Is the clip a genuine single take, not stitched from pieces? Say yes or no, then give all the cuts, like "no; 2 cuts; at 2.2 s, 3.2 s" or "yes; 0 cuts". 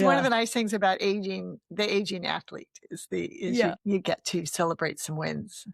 no; 1 cut; at 3.7 s